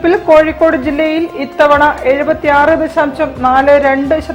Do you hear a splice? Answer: no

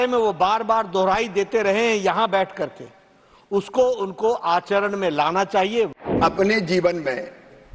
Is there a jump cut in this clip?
yes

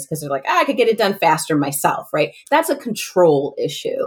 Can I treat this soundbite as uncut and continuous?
yes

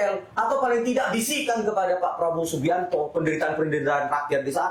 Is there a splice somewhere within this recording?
no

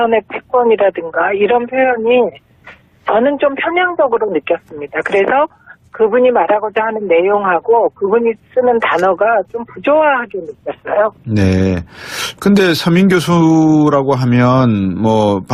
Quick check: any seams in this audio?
yes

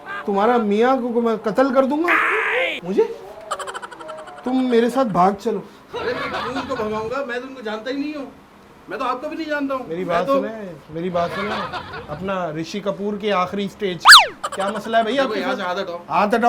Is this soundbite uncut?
yes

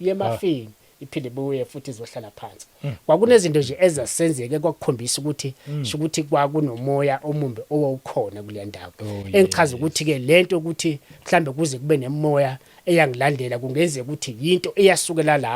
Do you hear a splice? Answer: no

